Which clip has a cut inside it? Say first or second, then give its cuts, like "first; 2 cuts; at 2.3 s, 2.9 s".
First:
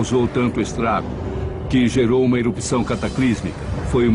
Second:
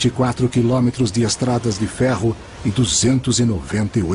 first; 1 cut; at 1.6 s